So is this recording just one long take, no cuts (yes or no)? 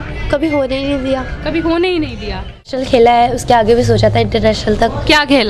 no